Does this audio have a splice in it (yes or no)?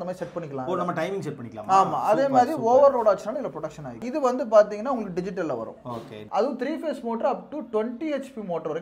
yes